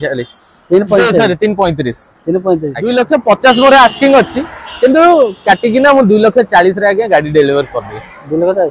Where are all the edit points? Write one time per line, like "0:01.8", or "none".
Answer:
0:02.8